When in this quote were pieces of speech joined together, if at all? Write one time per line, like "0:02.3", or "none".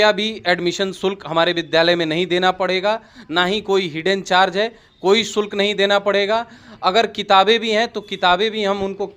none